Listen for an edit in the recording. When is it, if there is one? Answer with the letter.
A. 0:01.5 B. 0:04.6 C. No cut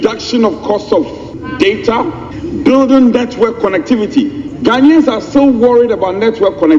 C